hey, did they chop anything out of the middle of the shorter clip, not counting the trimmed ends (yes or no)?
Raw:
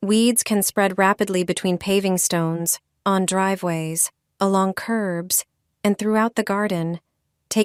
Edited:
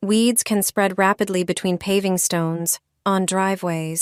no